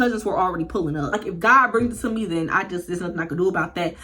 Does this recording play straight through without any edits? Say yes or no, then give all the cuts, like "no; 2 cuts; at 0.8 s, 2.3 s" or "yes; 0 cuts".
no; 1 cut; at 1.2 s